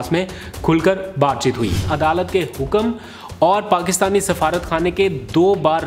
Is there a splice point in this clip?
yes; 1 cut; at 1.9 s

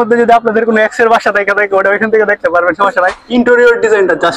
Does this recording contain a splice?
yes; 1 cut; at 3.2 s

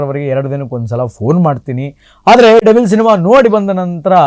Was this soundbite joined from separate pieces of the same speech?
no; 0 cuts

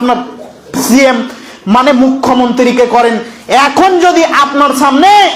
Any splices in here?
no; 0 cuts

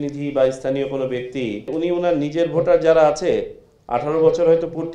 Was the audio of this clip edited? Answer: yes; 1 cut; at 1.7 s

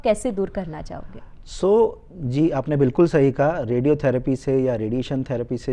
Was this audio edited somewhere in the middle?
no; 0 cuts

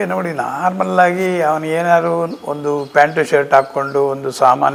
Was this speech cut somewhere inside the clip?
no; 0 cuts

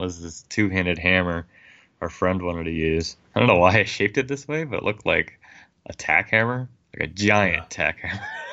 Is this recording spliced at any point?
yes; 1 cut; at 3.2 s

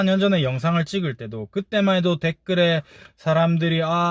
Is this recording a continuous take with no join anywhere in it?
yes; 0 cuts

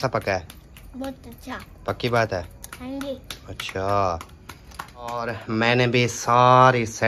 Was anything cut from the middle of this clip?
yes; 1 cut; at 5.2 s

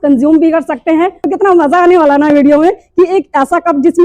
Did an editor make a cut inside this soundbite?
yes; 1 cut; at 1.2 s

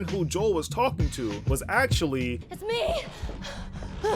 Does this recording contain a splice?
yes; 1 cut; at 2.4 s

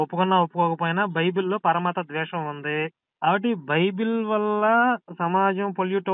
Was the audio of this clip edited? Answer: yes; 2 cuts; at 3.0 s, 5.1 s

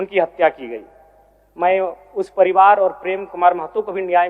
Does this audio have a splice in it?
no; 0 cuts

